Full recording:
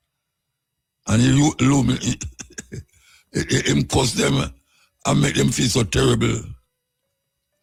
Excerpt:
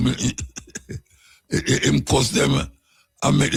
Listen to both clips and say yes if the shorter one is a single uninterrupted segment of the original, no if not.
yes